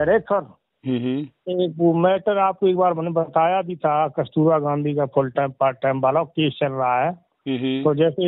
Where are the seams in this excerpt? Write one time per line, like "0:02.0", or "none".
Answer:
none